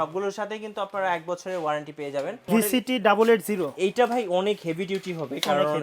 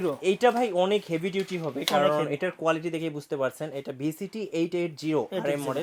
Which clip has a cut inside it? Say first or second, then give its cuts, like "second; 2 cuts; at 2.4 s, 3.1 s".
first; 1 cut; at 2.4 s